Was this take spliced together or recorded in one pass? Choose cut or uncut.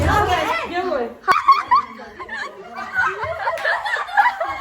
cut